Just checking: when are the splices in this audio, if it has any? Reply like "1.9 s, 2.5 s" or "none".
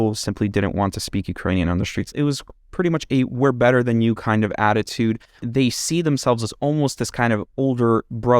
2.1 s, 5.4 s